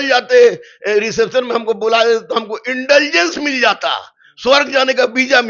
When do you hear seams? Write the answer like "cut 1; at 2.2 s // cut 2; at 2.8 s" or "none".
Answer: none